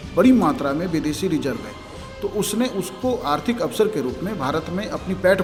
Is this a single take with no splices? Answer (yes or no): yes